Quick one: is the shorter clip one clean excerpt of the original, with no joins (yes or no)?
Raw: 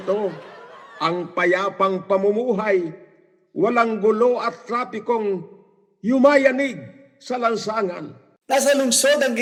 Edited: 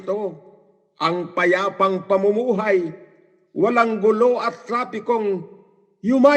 yes